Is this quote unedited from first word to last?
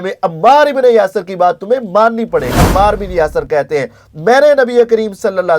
no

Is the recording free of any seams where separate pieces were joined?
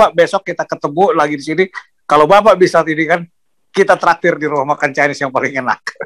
yes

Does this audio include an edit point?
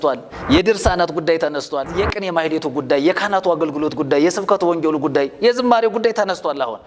yes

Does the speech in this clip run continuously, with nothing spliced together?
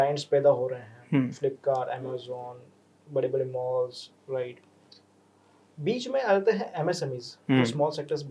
yes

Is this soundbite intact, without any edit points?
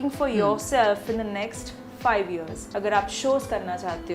no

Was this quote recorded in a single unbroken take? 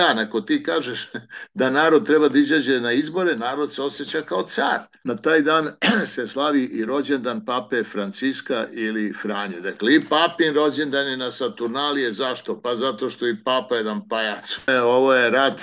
no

